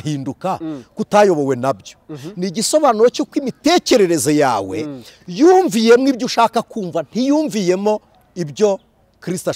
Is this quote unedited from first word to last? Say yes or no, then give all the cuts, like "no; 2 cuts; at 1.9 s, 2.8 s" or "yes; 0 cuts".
yes; 0 cuts